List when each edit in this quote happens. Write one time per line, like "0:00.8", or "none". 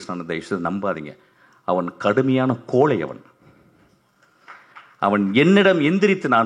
none

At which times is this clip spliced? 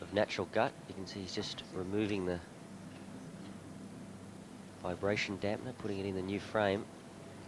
0:06.5

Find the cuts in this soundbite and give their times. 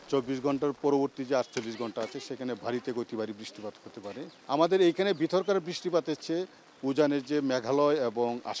none

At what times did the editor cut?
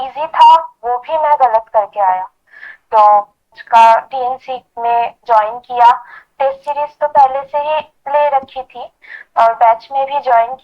0:03.6

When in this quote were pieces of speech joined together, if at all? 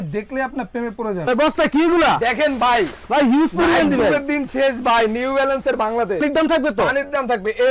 0:01.2
0:06.2

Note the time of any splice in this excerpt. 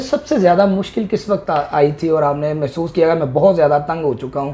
none

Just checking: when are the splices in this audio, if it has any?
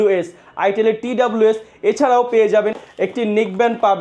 0:03.0

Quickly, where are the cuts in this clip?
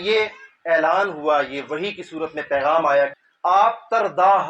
0:03.3

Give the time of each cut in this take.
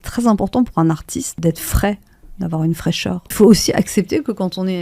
0:01.4
0:03.3

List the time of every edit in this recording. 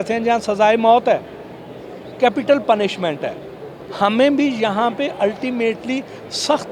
none

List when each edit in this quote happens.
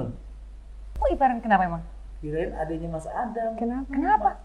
0:00.9

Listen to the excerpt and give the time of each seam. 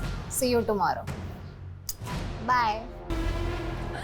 0:03.1

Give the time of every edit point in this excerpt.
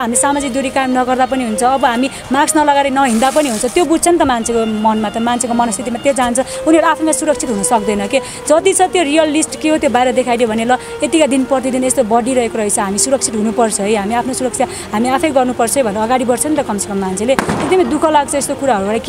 none

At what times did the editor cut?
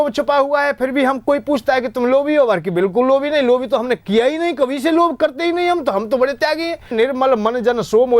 0:06.9

